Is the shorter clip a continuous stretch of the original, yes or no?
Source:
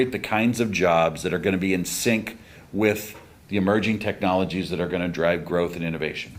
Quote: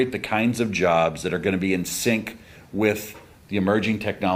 yes